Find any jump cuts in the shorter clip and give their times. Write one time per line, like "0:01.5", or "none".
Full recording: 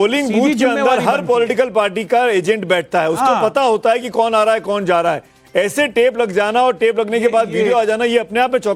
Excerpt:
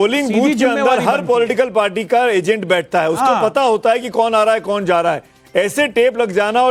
none